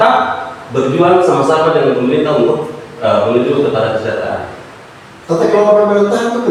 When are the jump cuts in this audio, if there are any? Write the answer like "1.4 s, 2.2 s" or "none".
none